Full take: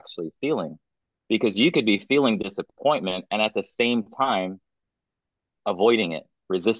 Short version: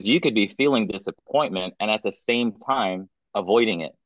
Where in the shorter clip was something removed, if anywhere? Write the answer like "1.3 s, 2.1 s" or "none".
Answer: 3.1 s